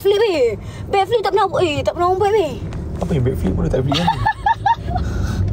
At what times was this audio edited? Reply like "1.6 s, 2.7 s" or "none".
none